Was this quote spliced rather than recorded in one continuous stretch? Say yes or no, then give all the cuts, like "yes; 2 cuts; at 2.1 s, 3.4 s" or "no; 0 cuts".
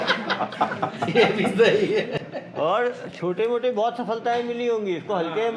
no; 0 cuts